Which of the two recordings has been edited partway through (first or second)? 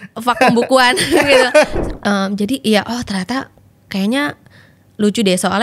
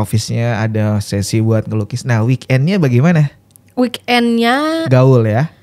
first